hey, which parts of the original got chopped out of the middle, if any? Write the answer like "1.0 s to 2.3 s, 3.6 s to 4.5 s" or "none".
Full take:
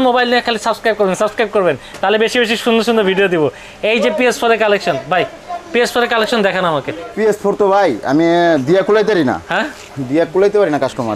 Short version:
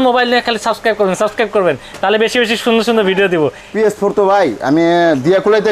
3.6 s to 7.1 s